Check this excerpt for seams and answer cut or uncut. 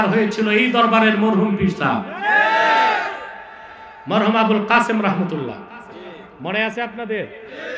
uncut